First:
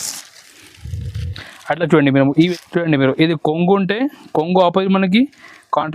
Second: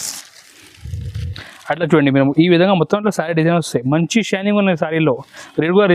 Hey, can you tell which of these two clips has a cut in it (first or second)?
first